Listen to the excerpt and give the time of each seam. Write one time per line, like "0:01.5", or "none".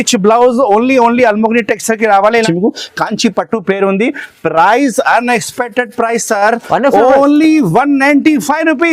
0:02.4

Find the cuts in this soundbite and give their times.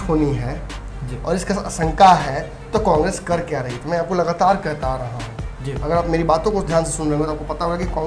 none

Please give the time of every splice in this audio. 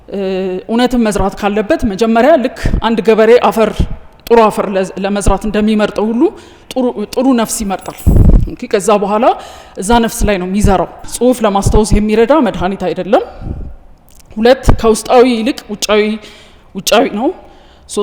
0:11.1

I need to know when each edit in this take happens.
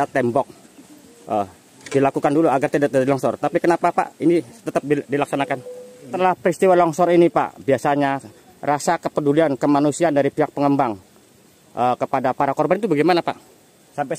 0:06.1

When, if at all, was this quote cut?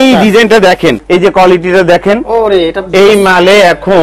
0:01.0

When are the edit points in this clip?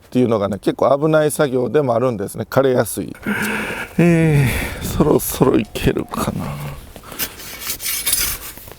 0:03.1

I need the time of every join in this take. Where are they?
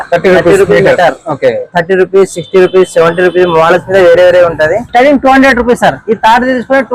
0:04.8

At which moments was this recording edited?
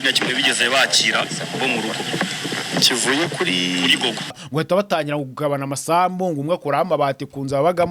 0:04.4

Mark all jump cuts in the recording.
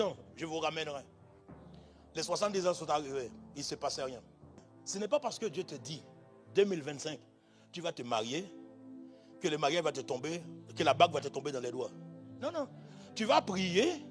0:04.7

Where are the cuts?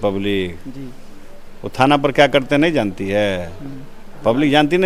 none

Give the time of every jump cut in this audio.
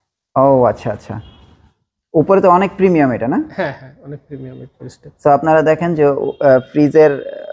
none

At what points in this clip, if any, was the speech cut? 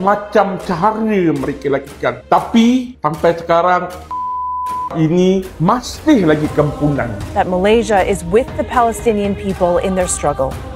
0:07.2

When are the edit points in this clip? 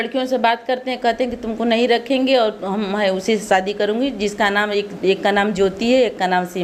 none

